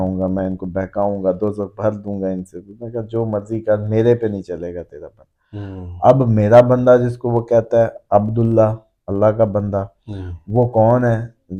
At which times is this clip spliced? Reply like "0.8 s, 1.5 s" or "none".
none